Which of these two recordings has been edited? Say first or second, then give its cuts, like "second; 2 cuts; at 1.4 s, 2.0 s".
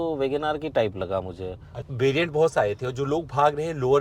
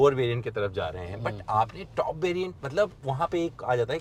first; 1 cut; at 1.7 s